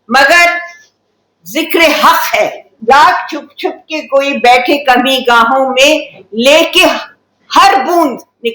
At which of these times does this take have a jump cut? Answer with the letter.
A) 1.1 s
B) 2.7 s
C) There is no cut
B